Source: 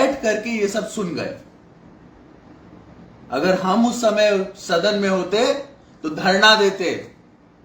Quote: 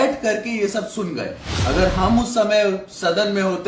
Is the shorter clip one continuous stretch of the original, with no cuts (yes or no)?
no